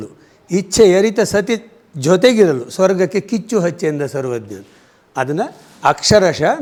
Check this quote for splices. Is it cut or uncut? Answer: uncut